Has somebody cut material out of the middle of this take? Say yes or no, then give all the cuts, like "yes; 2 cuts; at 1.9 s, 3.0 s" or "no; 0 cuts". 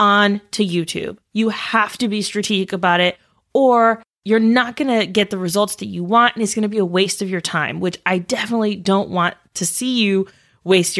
yes; 1 cut; at 4.1 s